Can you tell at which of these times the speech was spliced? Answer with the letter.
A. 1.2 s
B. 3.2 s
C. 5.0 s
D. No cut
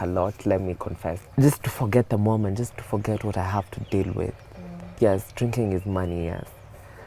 A